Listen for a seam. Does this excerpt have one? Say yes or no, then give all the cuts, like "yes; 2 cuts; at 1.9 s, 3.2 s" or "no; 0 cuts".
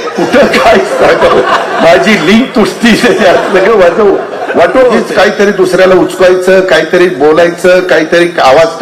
yes; 1 cut; at 5.0 s